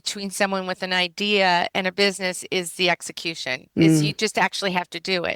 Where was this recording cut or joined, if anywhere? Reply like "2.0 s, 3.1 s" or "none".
none